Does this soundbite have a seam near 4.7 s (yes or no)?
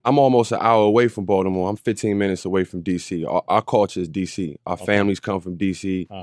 yes